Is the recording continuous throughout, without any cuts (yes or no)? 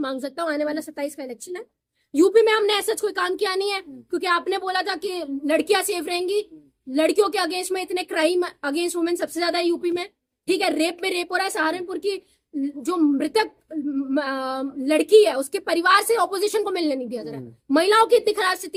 yes